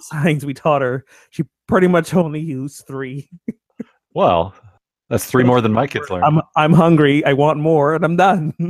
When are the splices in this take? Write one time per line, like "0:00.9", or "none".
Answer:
none